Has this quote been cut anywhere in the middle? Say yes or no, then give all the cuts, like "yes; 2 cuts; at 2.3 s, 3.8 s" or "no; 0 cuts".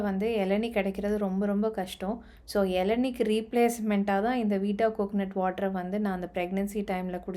no; 0 cuts